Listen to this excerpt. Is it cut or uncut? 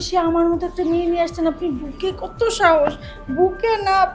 uncut